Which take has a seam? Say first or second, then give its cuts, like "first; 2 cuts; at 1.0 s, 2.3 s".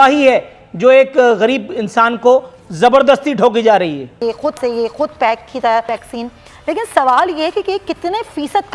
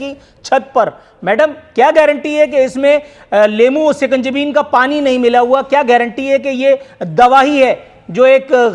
first; 2 cuts; at 4.2 s, 6.0 s